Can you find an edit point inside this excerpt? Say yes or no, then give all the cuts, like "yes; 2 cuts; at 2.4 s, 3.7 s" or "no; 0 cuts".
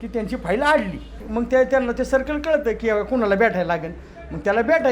yes; 1 cut; at 1.2 s